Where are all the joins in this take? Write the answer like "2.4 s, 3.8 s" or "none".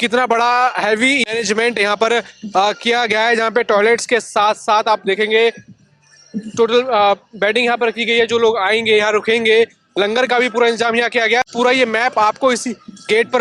none